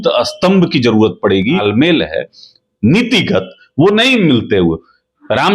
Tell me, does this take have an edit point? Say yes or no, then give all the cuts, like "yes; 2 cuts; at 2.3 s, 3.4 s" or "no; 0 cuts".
yes; 1 cut; at 1.6 s